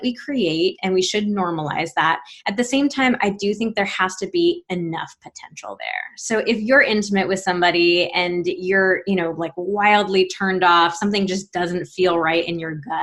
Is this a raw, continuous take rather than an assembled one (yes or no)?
yes